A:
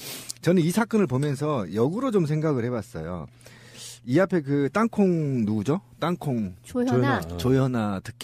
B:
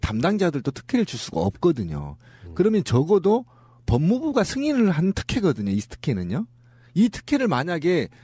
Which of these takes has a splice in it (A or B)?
A